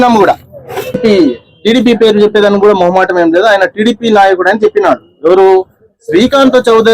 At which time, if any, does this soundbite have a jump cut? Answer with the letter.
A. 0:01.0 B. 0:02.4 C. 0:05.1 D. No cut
A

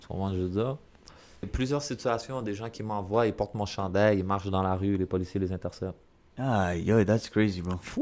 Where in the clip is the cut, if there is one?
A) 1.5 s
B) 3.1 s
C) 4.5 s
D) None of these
A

